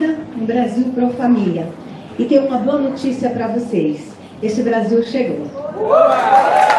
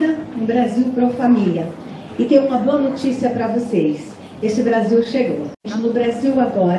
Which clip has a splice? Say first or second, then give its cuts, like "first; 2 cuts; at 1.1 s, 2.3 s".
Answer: second; 1 cut; at 5.5 s